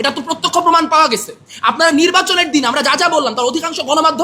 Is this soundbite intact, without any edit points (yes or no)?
yes